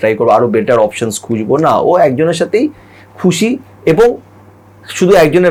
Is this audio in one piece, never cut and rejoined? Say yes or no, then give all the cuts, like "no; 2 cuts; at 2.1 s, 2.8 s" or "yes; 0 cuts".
yes; 0 cuts